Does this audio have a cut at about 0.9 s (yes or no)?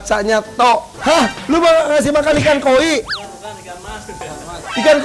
yes